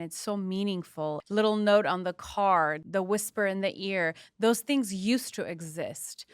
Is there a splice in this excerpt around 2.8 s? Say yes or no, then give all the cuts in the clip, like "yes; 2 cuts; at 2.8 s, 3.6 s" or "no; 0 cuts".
yes; 2 cuts; at 1.2 s, 2.8 s